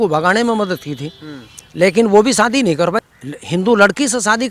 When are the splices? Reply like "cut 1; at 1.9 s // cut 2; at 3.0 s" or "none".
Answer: cut 1; at 3.0 s